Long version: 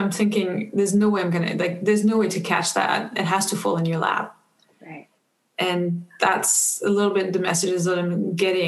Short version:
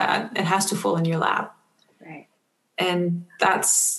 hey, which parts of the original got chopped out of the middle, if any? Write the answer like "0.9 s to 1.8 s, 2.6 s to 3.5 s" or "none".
none